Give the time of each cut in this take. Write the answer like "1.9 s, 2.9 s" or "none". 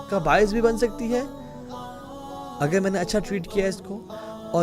1.3 s, 2.6 s